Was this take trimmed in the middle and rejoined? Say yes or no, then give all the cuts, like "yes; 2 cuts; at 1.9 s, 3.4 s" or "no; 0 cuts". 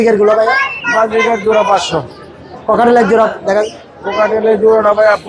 no; 0 cuts